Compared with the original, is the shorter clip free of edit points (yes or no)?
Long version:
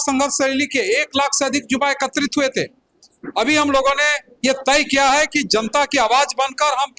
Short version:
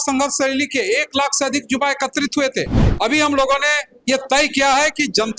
no